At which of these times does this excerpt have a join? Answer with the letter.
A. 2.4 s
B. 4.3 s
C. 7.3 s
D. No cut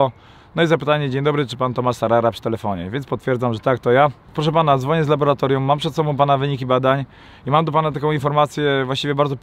B